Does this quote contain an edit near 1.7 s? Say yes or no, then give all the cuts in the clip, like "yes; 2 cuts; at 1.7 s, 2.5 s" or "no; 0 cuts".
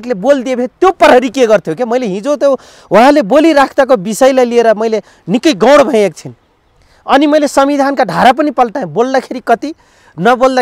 no; 0 cuts